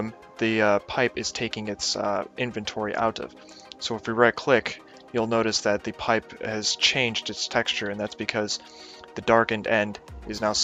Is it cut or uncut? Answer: cut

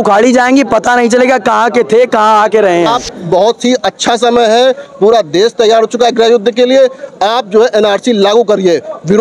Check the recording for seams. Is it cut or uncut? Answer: cut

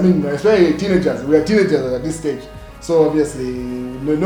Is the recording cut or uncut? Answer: uncut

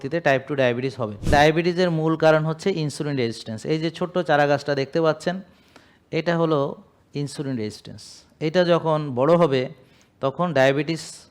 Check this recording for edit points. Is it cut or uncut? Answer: cut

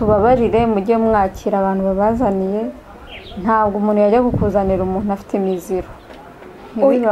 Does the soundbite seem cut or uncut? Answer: uncut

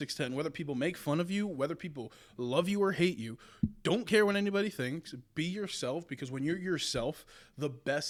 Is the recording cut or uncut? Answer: uncut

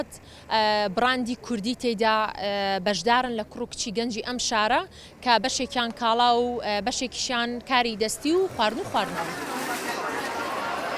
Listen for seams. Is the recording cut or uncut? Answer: uncut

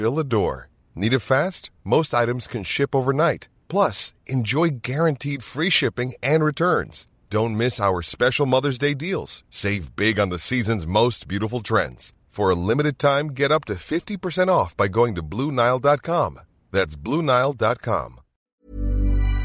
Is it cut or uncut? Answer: cut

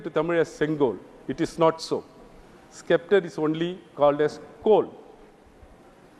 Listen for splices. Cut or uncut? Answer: uncut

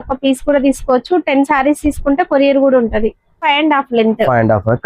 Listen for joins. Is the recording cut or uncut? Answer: cut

